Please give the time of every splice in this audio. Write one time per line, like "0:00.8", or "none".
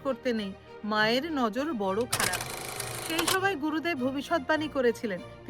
0:02.6